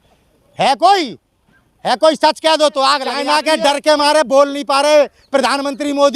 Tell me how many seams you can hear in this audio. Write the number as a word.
one